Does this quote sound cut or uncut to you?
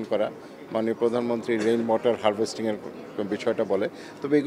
uncut